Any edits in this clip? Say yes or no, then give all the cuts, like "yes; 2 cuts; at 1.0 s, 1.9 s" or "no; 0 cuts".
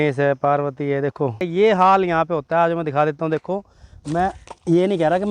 yes; 1 cut; at 1.4 s